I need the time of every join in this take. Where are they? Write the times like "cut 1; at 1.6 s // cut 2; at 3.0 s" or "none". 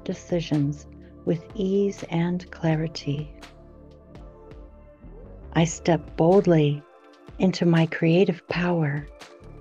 cut 1; at 3.3 s // cut 2; at 5.5 s

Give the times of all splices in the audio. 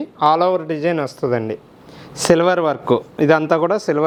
none

